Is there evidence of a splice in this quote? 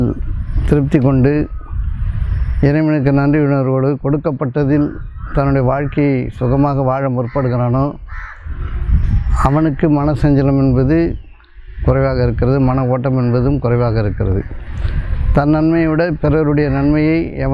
no; 0 cuts

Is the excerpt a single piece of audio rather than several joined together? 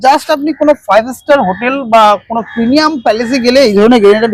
yes; 0 cuts

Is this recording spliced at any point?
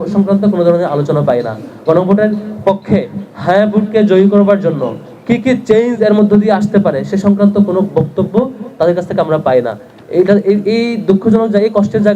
no; 0 cuts

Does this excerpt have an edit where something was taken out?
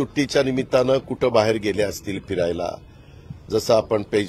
no; 0 cuts

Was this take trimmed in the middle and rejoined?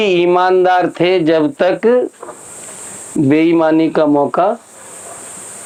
no; 0 cuts

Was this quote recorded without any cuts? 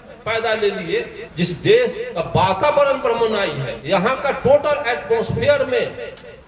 no; 3 cuts; at 1.2 s, 2.0 s, 3.7 s

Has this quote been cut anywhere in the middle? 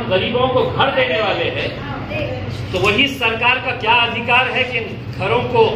no; 0 cuts

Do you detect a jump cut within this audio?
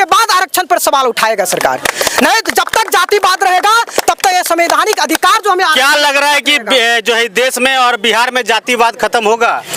no; 0 cuts

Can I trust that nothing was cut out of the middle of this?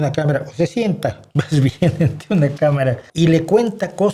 no; 1 cut; at 3.0 s

